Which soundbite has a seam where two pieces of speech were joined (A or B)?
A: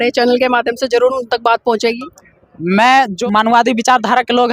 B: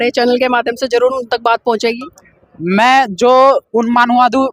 A